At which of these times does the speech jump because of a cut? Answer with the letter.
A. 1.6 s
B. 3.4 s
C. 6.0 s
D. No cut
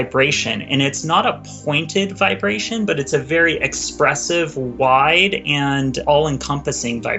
C